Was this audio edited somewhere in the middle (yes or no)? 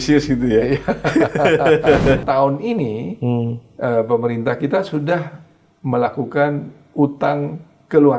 yes